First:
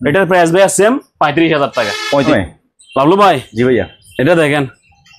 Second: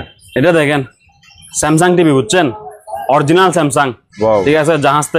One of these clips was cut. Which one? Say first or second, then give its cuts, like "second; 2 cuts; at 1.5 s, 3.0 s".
first; 1 cut; at 2.3 s